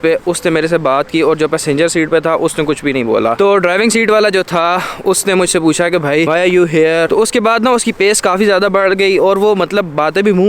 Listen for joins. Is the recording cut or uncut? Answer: uncut